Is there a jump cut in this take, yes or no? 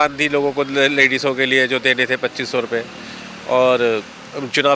no